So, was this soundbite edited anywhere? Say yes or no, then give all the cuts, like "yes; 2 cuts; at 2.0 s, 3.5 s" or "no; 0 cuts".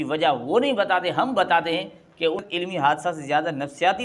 yes; 1 cut; at 2.4 s